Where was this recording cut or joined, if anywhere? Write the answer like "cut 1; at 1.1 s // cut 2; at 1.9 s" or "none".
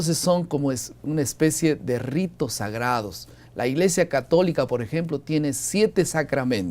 cut 1; at 1.6 s